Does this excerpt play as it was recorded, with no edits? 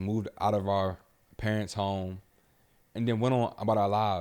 yes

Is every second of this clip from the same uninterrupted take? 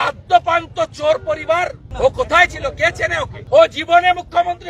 no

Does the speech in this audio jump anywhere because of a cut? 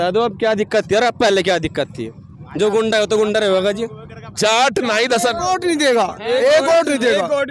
yes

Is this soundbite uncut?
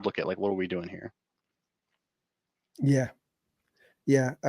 yes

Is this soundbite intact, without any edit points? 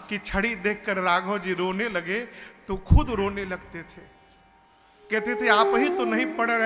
yes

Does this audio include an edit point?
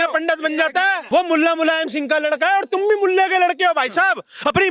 yes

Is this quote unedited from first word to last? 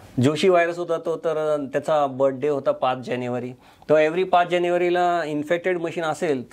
yes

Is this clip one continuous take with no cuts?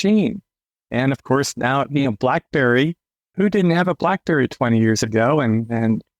no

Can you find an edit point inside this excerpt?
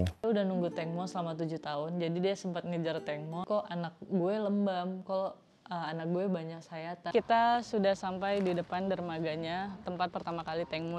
yes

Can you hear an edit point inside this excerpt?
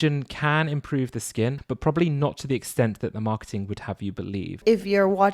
yes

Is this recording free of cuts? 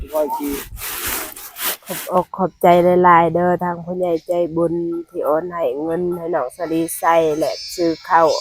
no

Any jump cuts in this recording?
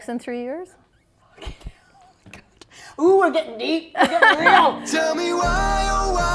yes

